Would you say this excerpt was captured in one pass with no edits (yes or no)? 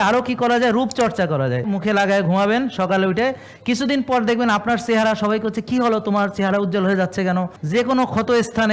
no